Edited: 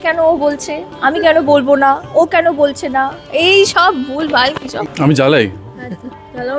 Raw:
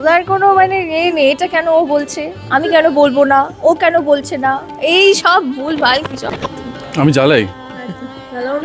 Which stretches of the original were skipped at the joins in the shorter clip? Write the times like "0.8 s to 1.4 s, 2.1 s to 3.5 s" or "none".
6.2 s to 6.7 s

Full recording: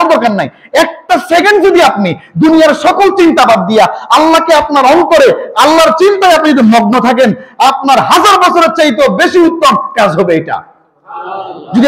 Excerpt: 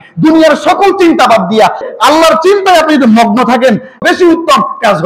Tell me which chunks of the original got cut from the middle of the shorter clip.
4.0 s to 5.4 s, 7.5 s to 9.1 s

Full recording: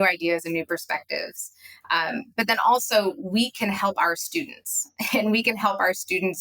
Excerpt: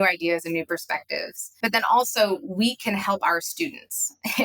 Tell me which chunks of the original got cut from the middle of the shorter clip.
1.5 s to 2.3 s

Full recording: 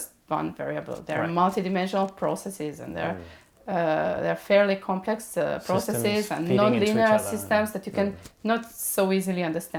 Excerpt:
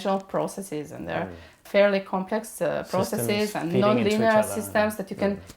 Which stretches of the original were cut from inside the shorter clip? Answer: 3.5 s to 4.4 s

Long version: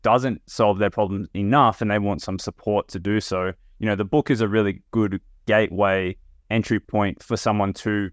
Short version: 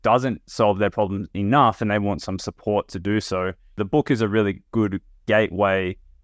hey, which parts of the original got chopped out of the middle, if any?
3.8 s to 4.0 s

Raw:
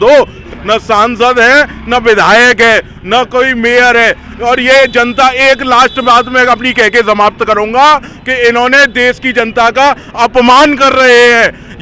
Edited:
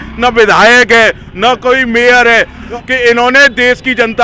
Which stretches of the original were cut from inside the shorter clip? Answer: 4.4 s to 8.1 s

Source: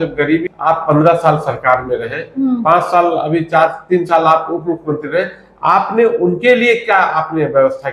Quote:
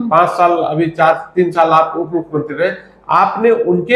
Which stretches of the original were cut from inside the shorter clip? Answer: none

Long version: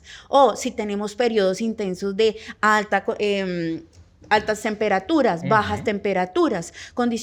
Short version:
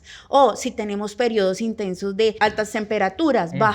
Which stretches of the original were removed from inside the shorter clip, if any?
2.4 s to 4.3 s

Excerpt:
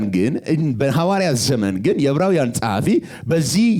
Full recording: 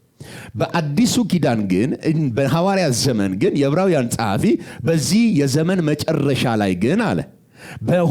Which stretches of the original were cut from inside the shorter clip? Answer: none

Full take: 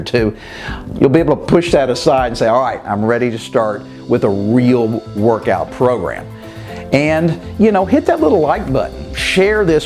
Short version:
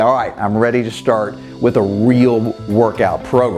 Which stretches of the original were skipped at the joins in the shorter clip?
none

